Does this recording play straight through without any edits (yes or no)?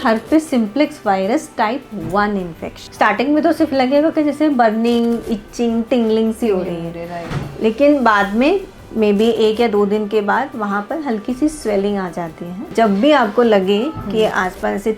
no